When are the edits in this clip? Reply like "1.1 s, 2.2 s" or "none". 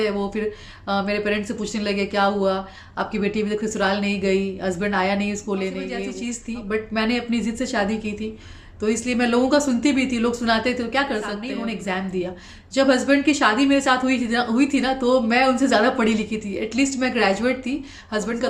6.1 s, 11.4 s